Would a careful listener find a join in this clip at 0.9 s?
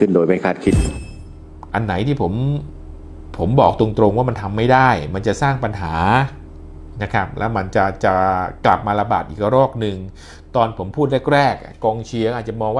yes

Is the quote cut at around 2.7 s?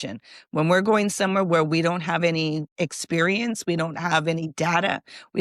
yes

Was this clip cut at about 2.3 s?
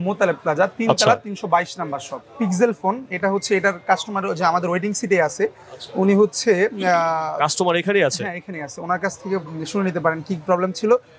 yes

